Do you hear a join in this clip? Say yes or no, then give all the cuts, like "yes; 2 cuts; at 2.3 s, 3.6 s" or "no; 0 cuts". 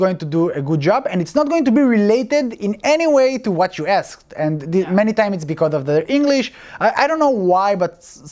no; 0 cuts